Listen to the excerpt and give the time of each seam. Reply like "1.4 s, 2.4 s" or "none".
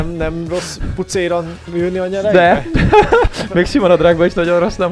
3.4 s